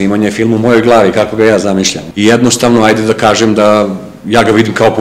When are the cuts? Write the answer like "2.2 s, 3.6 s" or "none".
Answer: 2.0 s